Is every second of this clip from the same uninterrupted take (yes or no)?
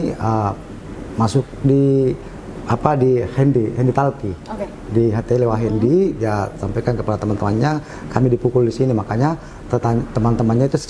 yes